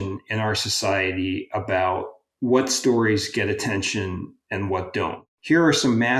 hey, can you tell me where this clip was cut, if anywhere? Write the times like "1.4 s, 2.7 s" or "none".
2.2 s, 4.3 s, 5.3 s